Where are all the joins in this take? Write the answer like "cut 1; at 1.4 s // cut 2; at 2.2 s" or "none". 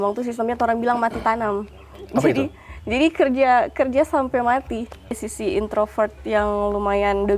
cut 1; at 5.3 s